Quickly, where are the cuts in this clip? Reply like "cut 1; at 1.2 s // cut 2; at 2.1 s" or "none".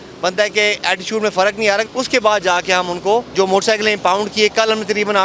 cut 1; at 1.8 s // cut 2; at 3.3 s